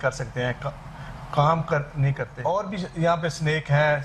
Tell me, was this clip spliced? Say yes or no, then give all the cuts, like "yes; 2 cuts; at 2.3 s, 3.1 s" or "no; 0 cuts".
yes; 1 cut; at 2.3 s